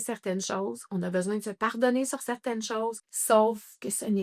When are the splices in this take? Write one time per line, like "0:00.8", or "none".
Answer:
0:03.1